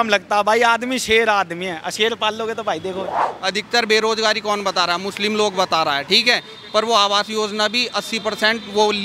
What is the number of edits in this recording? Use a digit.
1